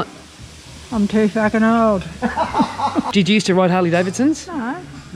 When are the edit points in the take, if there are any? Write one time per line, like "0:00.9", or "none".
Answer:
0:03.1